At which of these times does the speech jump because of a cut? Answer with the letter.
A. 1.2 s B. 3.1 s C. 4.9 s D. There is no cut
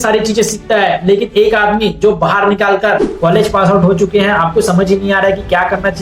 B